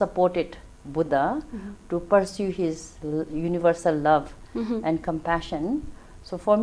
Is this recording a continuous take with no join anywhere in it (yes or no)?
yes